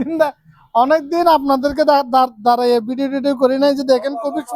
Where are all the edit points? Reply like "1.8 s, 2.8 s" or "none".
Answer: none